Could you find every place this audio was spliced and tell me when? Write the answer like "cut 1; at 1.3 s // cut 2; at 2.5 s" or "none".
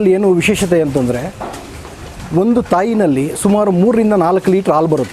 none